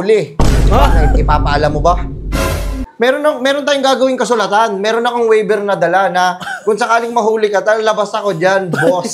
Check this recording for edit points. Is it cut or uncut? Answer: cut